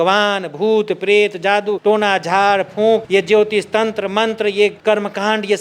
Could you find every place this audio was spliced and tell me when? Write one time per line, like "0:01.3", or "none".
0:01.7
0:03.1
0:04.8